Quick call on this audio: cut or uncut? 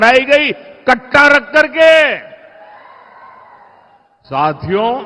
uncut